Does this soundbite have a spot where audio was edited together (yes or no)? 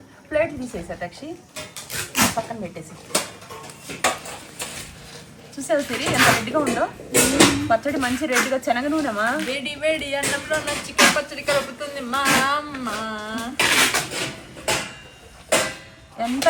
no